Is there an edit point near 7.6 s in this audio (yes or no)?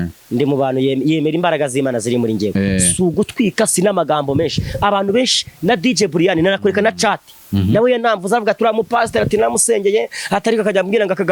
no